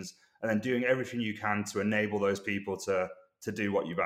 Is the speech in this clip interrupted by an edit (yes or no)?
no